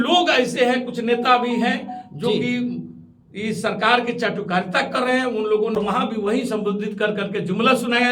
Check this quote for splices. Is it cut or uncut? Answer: cut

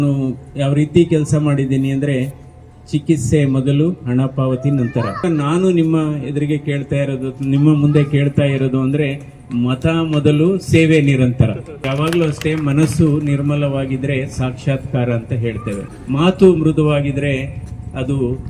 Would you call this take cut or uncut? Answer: cut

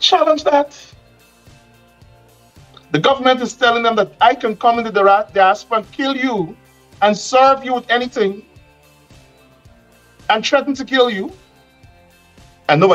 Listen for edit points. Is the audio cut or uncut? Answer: uncut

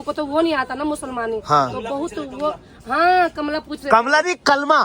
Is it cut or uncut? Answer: uncut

